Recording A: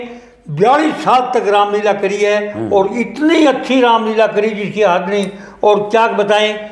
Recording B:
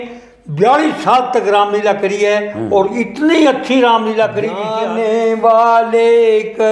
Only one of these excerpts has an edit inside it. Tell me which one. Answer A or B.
B